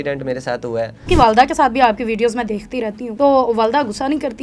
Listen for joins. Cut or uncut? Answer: cut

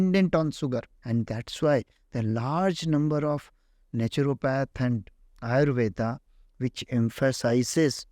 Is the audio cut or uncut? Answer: cut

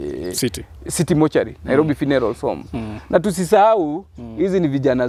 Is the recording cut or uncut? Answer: uncut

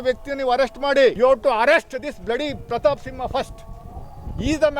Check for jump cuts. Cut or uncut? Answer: cut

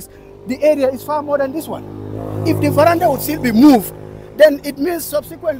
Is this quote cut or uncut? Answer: uncut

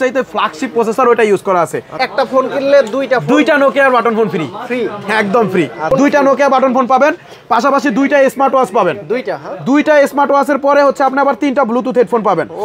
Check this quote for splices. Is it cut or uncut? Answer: cut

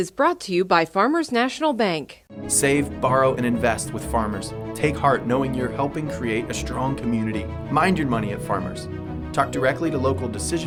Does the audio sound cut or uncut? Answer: uncut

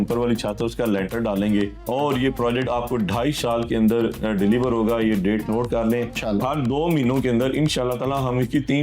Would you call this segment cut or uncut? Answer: cut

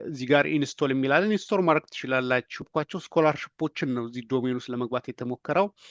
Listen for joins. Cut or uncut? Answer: cut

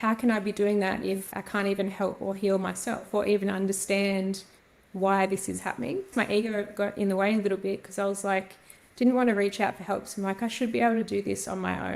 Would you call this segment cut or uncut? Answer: cut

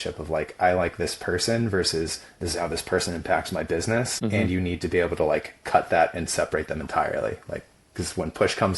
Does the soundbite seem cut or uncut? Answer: cut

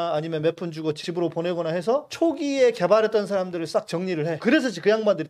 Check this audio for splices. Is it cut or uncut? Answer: cut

